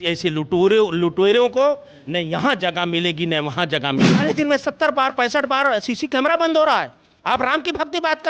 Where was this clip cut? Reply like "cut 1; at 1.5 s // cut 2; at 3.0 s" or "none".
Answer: cut 1; at 4.2 s